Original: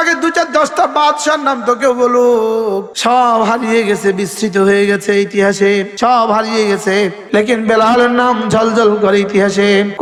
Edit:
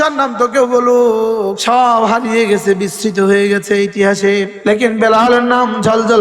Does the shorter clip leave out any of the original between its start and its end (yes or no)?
yes